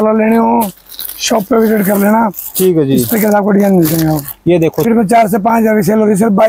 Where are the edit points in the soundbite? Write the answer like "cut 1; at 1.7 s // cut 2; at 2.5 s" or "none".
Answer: cut 1; at 4.8 s